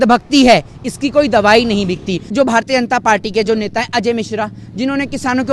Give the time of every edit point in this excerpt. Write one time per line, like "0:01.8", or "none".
0:02.2